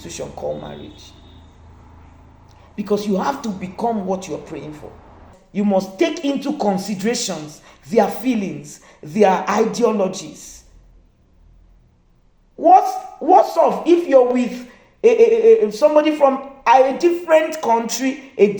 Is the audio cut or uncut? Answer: cut